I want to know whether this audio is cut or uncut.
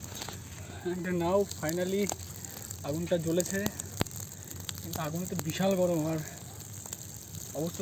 uncut